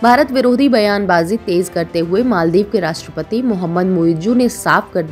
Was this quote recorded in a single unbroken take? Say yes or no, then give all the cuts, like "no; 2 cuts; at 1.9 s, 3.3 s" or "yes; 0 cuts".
yes; 0 cuts